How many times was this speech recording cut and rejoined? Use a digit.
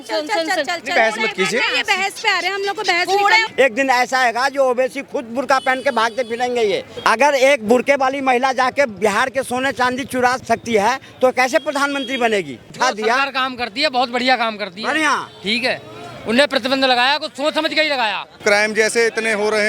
5